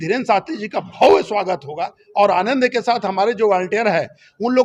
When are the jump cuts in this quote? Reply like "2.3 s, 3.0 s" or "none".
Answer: none